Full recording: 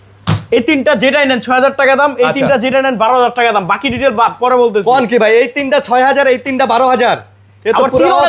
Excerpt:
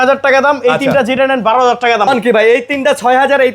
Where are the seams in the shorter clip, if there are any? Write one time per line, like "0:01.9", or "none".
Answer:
0:02.1